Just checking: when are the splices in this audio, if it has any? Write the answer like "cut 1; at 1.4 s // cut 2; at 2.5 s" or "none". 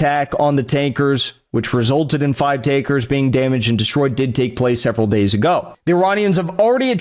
cut 1; at 5.7 s